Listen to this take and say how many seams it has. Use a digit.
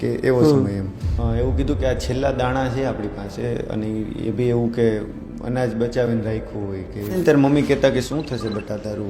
2